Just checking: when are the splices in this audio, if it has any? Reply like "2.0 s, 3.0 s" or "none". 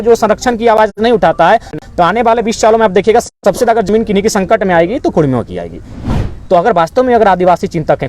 5.9 s